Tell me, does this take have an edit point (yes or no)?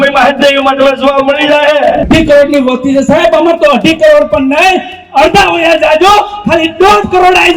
yes